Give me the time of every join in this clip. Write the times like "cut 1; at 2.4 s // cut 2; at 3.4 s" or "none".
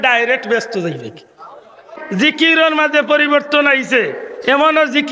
cut 1; at 2.0 s